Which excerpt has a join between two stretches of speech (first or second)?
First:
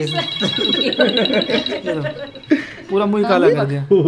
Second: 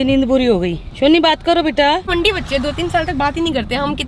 second